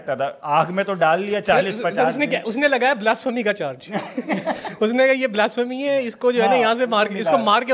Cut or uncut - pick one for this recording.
uncut